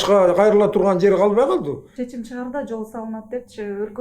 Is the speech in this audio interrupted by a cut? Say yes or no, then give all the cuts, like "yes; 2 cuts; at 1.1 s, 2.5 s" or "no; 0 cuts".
yes; 1 cut; at 1.9 s